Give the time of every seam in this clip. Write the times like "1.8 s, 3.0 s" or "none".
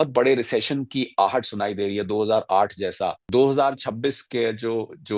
3.2 s